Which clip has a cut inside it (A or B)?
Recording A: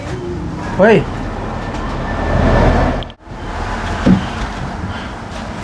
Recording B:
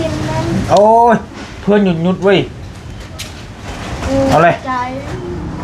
A